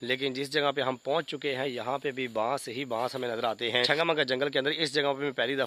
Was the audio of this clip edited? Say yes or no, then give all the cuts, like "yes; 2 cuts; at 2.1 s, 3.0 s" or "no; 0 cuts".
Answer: yes; 1 cut; at 3.9 s